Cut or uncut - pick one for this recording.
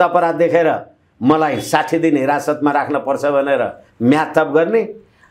uncut